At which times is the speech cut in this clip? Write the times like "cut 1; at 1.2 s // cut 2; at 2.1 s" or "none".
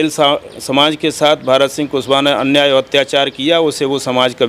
none